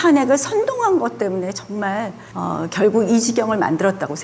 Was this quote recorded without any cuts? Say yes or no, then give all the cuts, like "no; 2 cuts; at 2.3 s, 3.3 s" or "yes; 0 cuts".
no; 1 cut; at 2.2 s